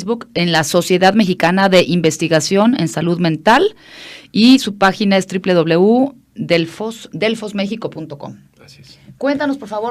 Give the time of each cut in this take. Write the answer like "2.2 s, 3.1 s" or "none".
5.9 s